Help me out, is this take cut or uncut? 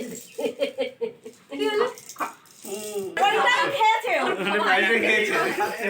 cut